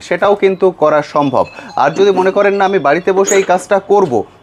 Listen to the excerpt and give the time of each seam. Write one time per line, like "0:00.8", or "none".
none